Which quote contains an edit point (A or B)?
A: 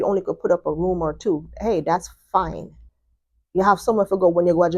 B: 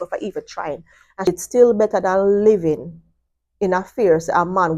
B